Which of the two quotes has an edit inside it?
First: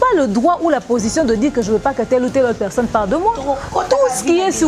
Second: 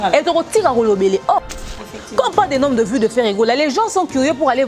second; 1 cut; at 1.7 s

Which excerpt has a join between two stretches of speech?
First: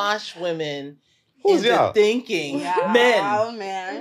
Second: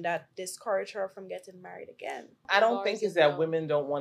second; 1 cut; at 2.4 s

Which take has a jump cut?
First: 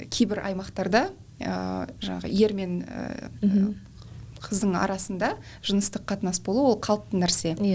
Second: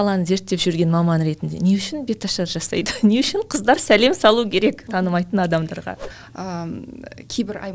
second; 1 cut; at 6.1 s

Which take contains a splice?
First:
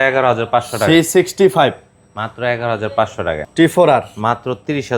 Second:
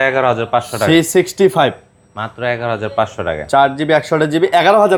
first; 1 cut; at 3.4 s

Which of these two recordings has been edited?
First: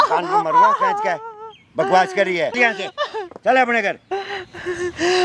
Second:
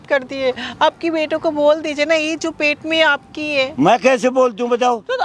first; 1 cut; at 2.5 s

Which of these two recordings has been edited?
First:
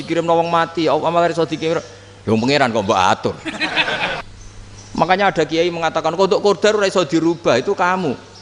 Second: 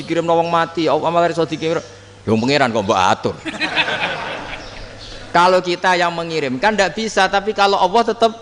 first; 1 cut; at 4.2 s

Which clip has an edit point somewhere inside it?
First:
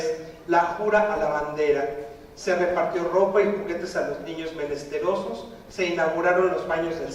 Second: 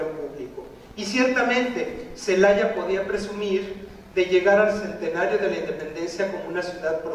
first; 1 cut; at 1.2 s

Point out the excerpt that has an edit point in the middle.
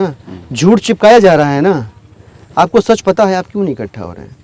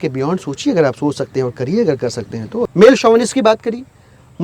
second; 1 cut; at 2.6 s

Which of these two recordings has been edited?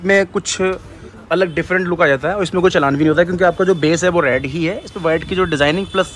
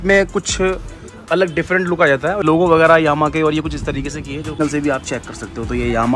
second; 2 cuts; at 2.4 s, 4.6 s

